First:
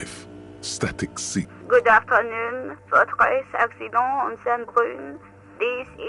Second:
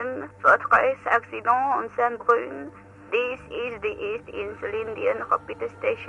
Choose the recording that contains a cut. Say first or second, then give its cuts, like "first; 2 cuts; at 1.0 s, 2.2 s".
first; 1 cut; at 1.6 s